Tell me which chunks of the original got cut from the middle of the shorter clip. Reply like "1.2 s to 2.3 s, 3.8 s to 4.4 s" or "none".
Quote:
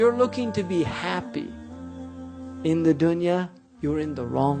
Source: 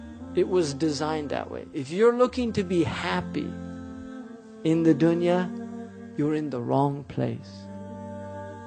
5.6 s to 6.0 s